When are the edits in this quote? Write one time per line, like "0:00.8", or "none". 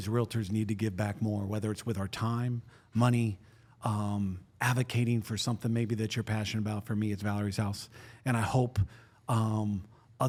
none